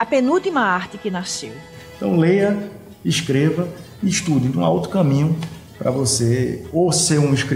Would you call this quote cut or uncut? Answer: cut